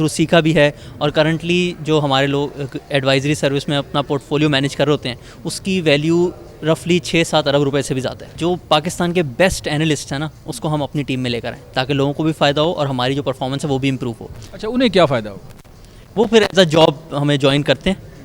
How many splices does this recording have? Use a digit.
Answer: 0